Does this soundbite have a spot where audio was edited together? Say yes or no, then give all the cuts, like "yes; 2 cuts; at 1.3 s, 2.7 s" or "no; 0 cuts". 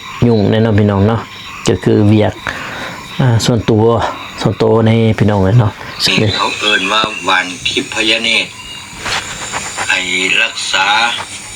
yes; 1 cut; at 6.0 s